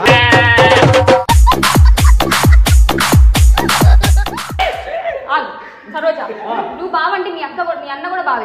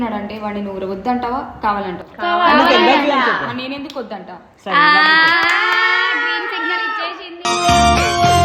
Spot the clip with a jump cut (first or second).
first